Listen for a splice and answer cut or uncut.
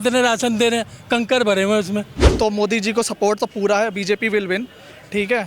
cut